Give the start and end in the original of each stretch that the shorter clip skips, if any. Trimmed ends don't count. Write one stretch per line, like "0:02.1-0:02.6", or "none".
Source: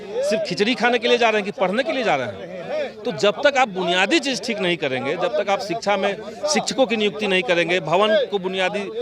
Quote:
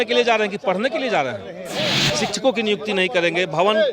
0:02.9-0:06.3